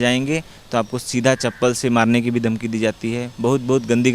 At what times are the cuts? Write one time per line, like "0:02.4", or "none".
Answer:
none